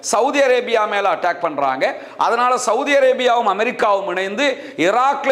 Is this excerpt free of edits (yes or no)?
yes